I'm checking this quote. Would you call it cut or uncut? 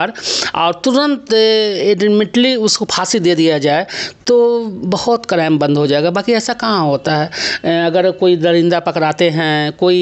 uncut